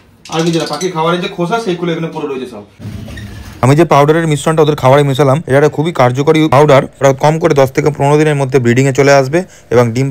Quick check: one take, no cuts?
no; 2 cuts; at 2.8 s, 6.9 s

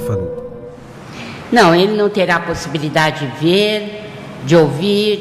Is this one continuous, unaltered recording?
no; 1 cut; at 2.8 s

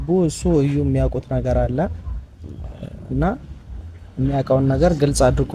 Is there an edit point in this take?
no; 0 cuts

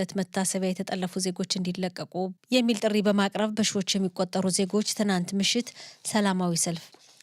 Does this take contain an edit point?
yes; 1 cut; at 2.3 s

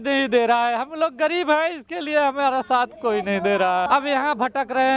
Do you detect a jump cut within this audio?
no; 0 cuts

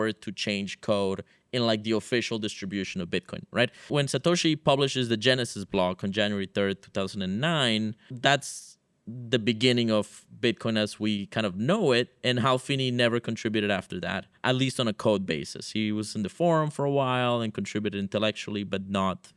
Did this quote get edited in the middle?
yes; 3 cuts; at 3.9 s, 8.1 s, 14.3 s

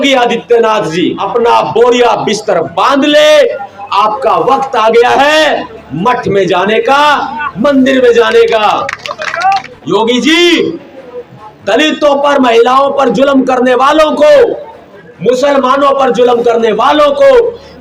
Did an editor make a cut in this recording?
yes; 2 cuts; at 1.2 s, 9.7 s

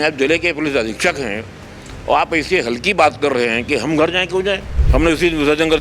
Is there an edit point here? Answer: yes; 1 cut; at 4.7 s

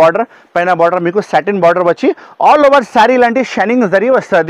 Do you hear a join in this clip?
no; 0 cuts

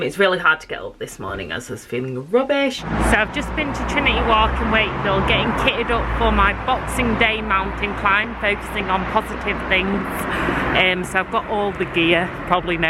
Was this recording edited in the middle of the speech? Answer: yes; 1 cut; at 2.8 s

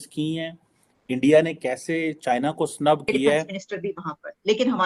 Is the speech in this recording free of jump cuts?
no; 1 cut; at 3.4 s

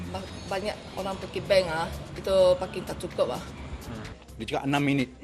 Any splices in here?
yes; 1 cut; at 4.0 s

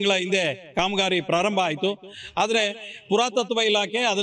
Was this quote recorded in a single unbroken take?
yes; 0 cuts

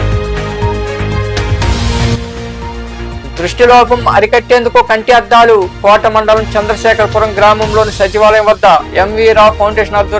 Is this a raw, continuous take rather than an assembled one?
no; 1 cut; at 1.5 s

